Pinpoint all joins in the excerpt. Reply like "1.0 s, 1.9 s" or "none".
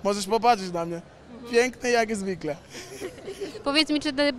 none